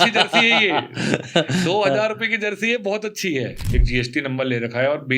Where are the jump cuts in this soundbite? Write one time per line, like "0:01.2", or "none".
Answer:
0:03.5